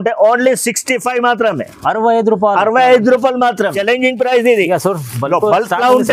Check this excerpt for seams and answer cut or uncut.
cut